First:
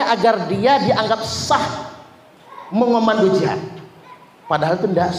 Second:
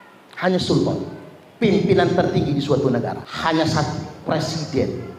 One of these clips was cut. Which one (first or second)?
second